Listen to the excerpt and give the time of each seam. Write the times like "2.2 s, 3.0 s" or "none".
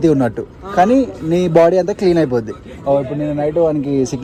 none